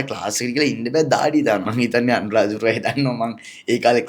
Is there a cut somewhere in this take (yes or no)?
yes